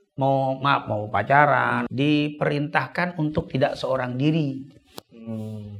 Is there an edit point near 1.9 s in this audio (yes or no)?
yes